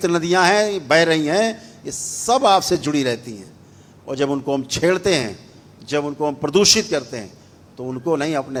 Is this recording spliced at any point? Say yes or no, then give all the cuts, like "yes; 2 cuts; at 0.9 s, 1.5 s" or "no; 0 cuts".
no; 0 cuts